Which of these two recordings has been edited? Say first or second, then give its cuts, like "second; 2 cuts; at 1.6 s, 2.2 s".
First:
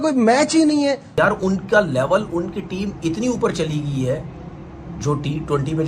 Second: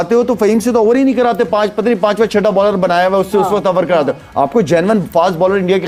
first; 1 cut; at 1.1 s